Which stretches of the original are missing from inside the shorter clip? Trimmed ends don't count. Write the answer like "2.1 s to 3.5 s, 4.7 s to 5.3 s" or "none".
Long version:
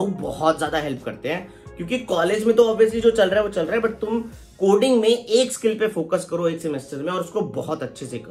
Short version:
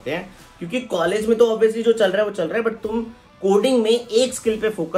none